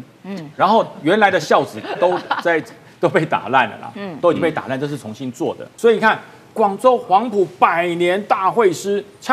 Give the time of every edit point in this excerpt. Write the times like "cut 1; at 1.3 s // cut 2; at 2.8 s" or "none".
cut 1; at 5.7 s